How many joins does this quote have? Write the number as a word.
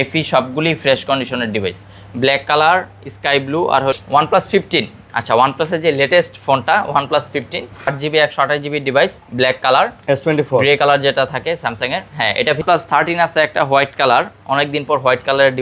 three